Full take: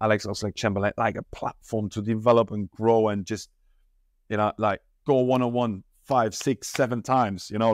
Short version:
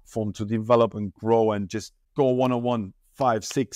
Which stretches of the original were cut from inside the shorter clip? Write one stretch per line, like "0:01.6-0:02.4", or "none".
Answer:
0:03.6-0:04.9